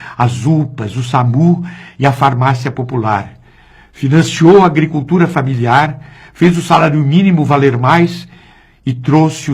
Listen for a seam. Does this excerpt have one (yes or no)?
no